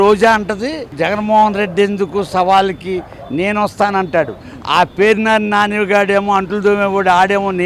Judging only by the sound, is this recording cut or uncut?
cut